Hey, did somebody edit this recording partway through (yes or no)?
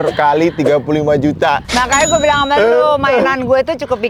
no